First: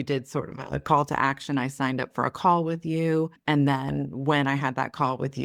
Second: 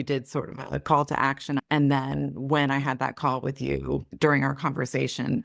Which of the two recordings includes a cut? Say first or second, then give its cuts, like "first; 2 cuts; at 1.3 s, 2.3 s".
second; 1 cut; at 1.6 s